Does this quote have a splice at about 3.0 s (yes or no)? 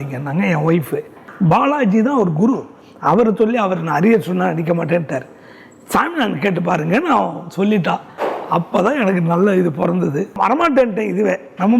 no